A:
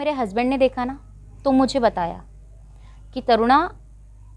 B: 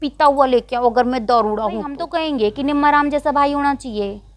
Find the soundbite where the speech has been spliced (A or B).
B